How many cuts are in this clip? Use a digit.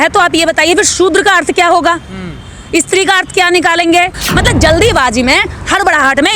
1